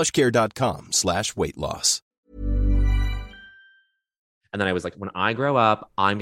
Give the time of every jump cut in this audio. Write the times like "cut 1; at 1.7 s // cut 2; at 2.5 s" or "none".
cut 1; at 4.3 s